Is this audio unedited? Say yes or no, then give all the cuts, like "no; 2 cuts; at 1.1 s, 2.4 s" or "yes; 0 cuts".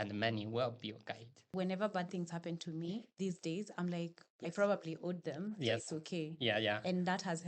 no; 1 cut; at 1.5 s